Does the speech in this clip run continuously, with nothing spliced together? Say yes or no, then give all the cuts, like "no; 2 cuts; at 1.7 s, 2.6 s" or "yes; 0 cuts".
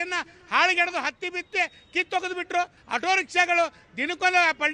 no; 1 cut; at 2.8 s